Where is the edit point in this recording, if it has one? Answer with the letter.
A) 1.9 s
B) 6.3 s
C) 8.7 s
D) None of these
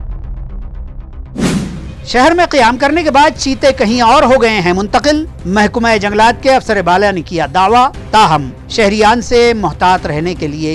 A